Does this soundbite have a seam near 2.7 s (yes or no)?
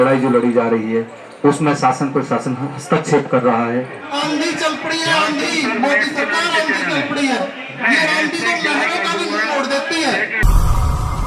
no